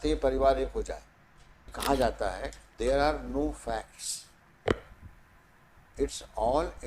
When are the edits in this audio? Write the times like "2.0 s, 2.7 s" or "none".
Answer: 1.7 s

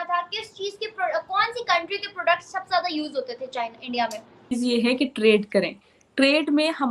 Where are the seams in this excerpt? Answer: 4.5 s

